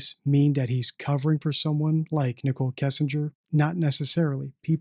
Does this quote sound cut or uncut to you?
cut